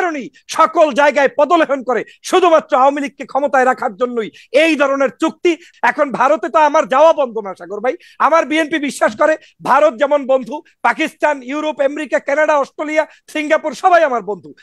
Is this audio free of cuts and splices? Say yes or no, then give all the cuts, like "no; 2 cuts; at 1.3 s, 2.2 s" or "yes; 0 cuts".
no; 1 cut; at 5.7 s